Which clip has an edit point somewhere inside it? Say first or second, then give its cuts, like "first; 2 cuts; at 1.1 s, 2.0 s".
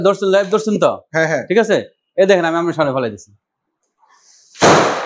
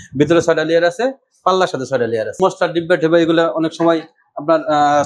second; 1 cut; at 2.4 s